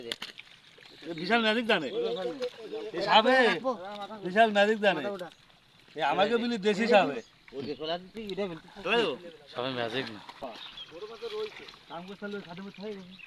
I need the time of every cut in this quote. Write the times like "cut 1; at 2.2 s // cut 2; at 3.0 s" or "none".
cut 1; at 10.4 s